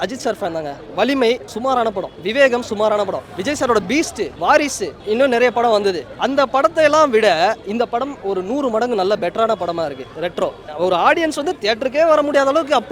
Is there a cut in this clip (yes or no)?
yes